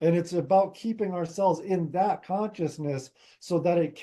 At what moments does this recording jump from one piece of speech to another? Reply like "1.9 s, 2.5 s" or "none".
none